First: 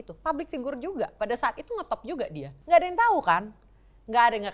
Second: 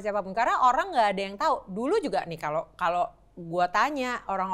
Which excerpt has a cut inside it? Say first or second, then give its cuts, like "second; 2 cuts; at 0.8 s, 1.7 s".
first; 1 cut; at 2.5 s